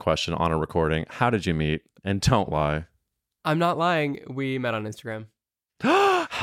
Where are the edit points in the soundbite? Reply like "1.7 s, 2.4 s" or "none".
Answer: none